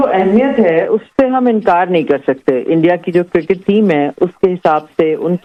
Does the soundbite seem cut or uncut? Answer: uncut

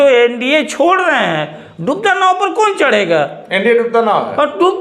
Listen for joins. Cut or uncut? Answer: uncut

